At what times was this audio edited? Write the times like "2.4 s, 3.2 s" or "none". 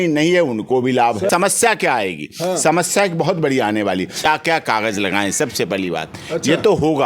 1.3 s, 4.3 s